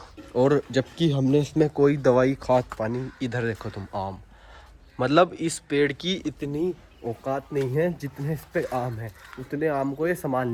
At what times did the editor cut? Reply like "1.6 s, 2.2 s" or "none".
none